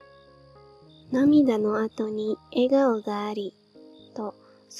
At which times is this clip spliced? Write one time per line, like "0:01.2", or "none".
0:01.0